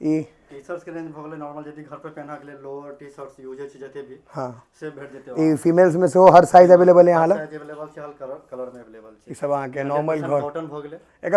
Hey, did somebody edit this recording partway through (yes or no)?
no